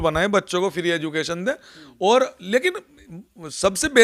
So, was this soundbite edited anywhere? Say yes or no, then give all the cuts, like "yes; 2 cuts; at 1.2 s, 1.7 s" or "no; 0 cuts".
no; 0 cuts